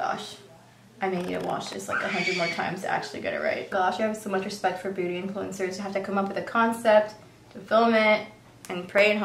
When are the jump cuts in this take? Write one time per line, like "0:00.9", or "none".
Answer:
0:03.9